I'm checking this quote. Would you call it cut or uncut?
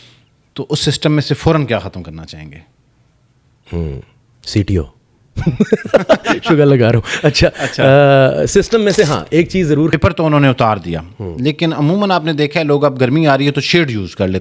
cut